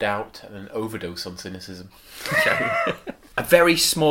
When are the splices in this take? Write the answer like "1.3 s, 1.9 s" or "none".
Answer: 3.2 s